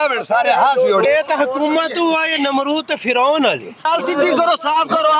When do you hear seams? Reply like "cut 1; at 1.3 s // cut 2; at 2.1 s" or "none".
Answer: cut 1; at 1.1 s // cut 2; at 3.8 s

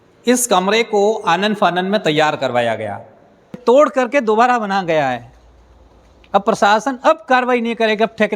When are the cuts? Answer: cut 1; at 3.6 s

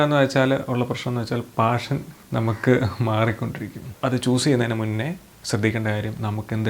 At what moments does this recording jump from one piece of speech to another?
cut 1; at 3.9 s

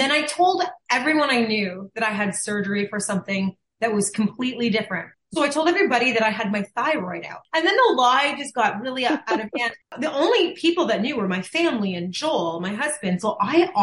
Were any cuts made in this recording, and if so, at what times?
cut 1; at 5.0 s // cut 2; at 7.4 s // cut 3; at 9.8 s

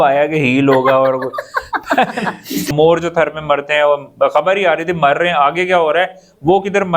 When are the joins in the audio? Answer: cut 1; at 2.7 s

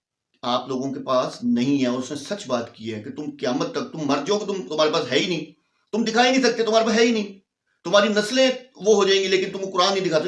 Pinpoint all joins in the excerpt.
none

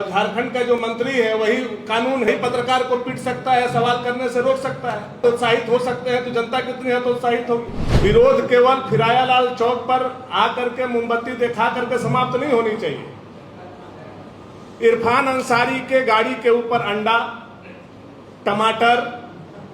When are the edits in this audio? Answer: cut 1; at 2.3 s // cut 2; at 5.2 s // cut 3; at 7.8 s

